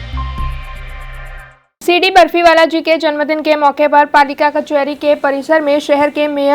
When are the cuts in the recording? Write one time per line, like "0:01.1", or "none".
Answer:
0:01.2